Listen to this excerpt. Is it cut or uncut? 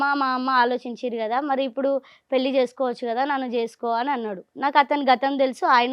uncut